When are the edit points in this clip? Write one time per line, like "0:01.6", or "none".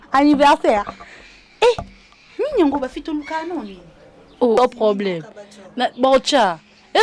0:04.6